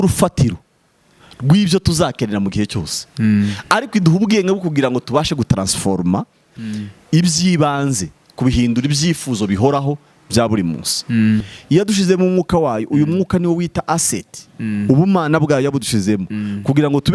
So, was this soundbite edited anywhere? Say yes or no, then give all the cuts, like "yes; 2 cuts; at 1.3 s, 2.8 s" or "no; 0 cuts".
yes; 1 cut; at 11.5 s